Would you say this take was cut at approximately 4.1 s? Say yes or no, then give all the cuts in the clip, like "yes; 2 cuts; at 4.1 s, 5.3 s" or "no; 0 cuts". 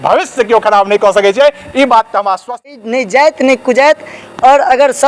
no; 1 cut; at 2.7 s